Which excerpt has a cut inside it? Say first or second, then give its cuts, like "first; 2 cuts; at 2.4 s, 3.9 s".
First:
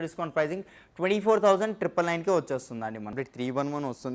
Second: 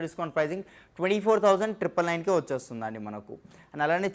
first; 1 cut; at 3.1 s